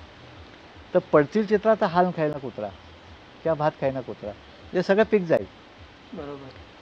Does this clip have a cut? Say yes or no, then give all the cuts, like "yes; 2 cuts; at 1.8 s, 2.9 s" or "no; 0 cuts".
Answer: no; 0 cuts